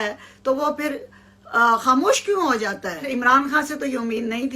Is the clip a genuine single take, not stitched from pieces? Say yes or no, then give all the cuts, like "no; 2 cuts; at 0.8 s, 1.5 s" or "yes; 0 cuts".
no; 1 cut; at 3.1 s